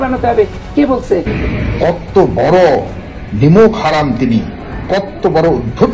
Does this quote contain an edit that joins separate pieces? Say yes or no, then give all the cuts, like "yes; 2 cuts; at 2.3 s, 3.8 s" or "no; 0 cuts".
yes; 1 cut; at 1.4 s